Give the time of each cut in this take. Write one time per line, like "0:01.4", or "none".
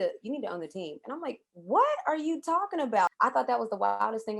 0:03.1